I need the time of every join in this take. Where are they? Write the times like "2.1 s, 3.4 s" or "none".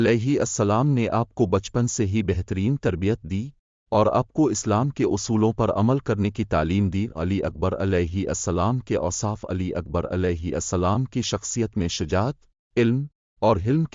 11.7 s